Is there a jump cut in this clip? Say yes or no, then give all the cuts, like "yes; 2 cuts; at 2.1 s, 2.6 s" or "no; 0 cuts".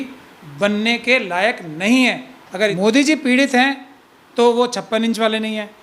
yes; 1 cut; at 2.7 s